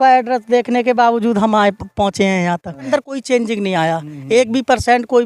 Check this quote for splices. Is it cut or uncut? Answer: cut